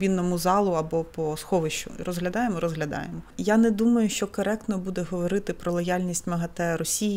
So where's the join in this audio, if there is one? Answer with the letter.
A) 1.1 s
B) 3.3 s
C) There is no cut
B